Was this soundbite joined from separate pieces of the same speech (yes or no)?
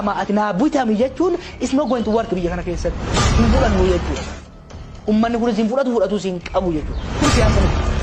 no